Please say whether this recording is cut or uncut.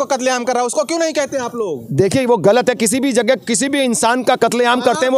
uncut